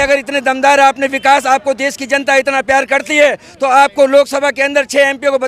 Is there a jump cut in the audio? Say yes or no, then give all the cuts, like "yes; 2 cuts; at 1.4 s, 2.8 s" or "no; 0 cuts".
no; 0 cuts